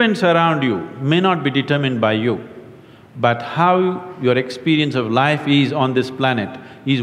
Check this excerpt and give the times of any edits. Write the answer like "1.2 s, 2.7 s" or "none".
none